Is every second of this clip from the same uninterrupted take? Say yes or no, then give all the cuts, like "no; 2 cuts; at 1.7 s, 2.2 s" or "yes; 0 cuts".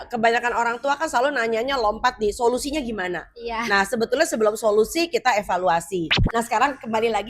no; 1 cut; at 6.2 s